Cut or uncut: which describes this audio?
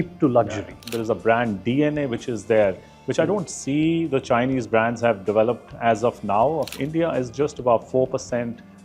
cut